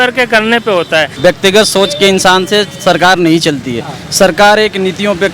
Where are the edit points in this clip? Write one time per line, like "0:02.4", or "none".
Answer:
0:01.1